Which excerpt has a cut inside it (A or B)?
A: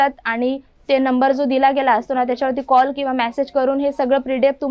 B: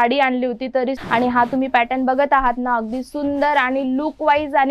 B